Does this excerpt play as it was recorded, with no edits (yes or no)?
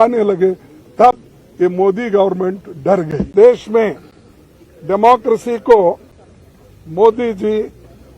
no